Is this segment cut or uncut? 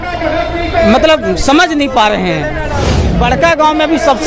cut